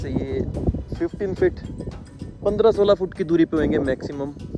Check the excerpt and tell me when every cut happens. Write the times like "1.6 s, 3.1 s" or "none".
none

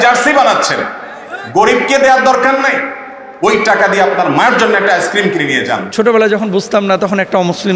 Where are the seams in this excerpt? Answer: 5.8 s

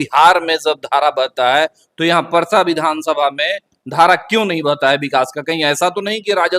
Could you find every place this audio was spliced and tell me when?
none

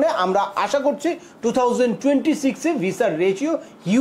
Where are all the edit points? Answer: none

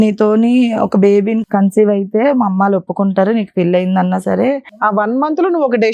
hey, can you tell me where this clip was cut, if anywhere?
1.4 s, 4.8 s

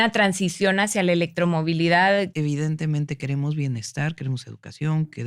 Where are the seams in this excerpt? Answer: 2.3 s

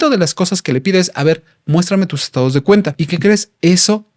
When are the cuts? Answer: 3.0 s

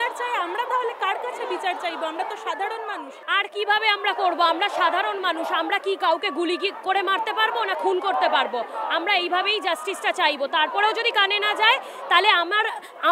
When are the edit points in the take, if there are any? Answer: 3.2 s

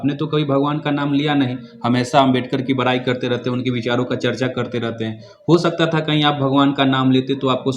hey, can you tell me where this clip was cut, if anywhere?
none

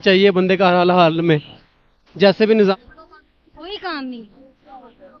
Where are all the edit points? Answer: 2.7 s

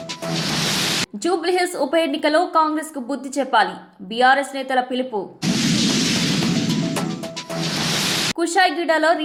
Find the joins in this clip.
none

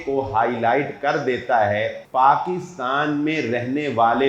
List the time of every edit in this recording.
2.0 s

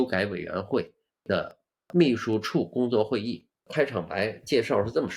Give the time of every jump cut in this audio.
3.5 s

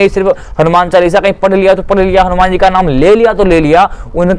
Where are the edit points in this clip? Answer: none

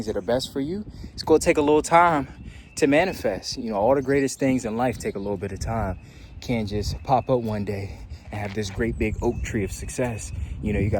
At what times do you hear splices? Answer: none

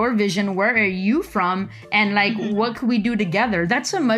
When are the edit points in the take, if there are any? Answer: none

